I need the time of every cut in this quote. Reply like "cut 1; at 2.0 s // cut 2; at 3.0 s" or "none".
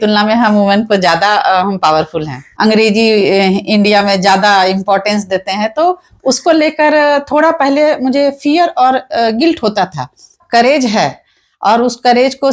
cut 1; at 2.4 s // cut 2; at 10.4 s